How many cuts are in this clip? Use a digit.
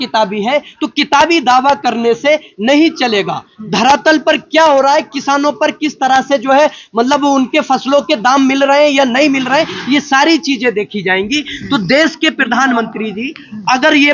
0